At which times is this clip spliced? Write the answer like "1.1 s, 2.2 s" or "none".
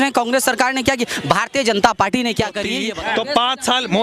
2.8 s